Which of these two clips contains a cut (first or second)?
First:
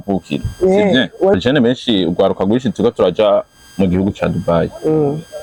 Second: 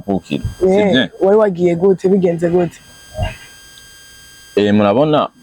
first